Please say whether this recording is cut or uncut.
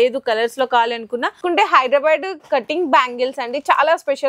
cut